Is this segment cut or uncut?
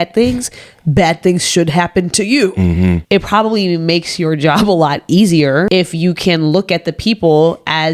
cut